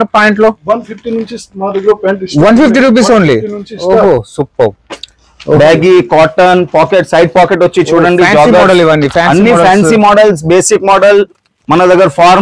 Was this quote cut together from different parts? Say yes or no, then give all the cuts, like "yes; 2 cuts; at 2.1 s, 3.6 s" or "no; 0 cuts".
no; 0 cuts